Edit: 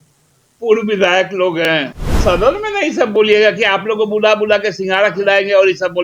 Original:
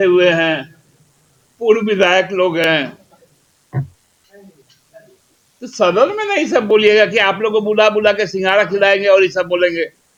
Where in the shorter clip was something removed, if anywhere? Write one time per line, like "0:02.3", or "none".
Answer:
0:02.0